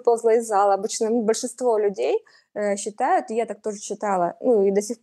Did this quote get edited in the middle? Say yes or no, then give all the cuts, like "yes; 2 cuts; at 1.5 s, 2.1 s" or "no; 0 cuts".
no; 0 cuts